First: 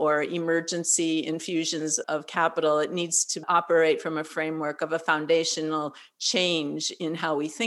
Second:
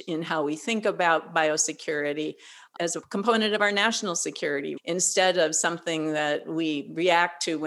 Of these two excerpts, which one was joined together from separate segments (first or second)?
second